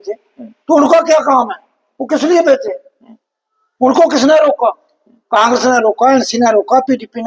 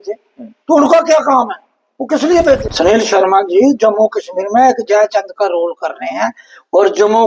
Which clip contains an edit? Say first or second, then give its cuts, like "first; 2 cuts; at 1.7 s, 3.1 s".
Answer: second; 1 cut; at 2.7 s